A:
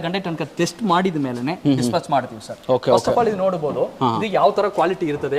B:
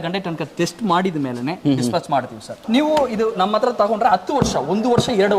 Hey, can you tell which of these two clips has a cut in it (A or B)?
B